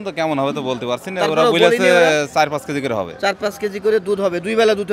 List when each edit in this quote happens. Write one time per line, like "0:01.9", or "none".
none